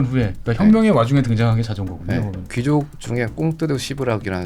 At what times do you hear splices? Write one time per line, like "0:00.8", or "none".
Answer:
0:02.4